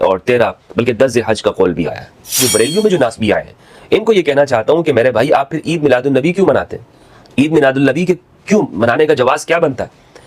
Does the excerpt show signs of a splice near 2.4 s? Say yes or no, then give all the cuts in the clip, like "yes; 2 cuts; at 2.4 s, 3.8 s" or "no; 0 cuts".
yes; 1 cut; at 2.4 s